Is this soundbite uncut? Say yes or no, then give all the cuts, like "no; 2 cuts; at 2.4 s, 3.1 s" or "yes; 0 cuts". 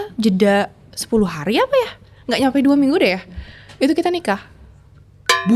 yes; 0 cuts